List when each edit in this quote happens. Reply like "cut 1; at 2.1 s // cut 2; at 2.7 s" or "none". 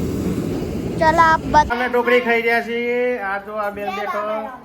cut 1; at 1.7 s